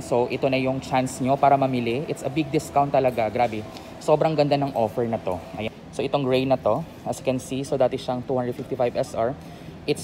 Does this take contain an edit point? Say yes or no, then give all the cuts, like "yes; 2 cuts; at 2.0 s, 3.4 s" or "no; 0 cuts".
yes; 1 cut; at 5.6 s